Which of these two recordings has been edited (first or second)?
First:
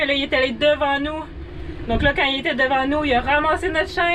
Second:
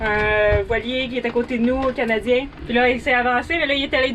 second